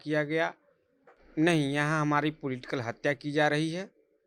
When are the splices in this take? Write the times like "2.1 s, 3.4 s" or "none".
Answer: 1.2 s